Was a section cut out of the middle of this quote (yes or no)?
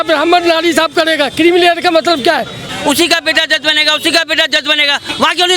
yes